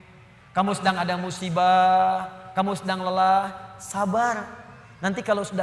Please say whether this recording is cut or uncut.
uncut